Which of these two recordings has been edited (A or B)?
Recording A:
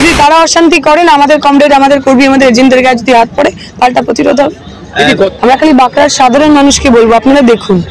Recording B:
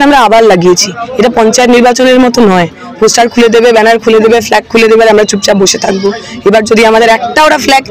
A